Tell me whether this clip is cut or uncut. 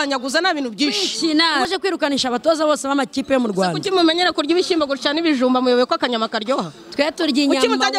cut